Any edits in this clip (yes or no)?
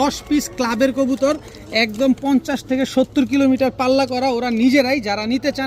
no